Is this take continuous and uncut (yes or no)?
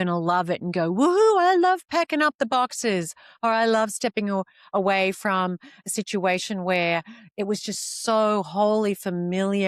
yes